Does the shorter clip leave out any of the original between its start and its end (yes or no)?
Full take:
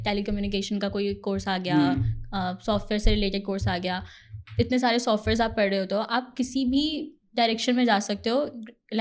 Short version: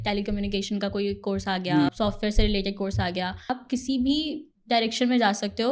yes